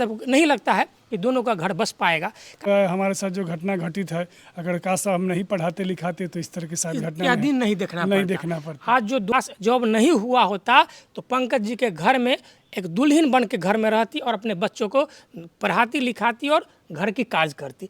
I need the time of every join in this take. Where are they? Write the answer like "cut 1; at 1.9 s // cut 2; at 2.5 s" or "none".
cut 1; at 2.6 s // cut 2; at 9.3 s